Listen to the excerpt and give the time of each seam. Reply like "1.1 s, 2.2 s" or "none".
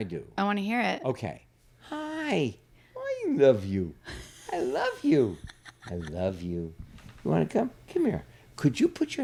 none